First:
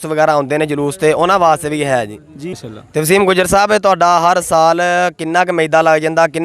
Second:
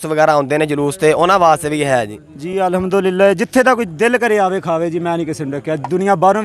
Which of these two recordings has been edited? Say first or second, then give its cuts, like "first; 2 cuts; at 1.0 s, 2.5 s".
first; 1 cut; at 2.4 s